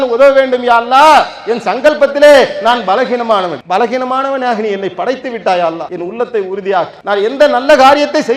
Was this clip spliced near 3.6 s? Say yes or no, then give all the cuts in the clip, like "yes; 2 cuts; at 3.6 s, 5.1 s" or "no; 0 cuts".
yes; 3 cuts; at 3.6 s, 5.9 s, 7.0 s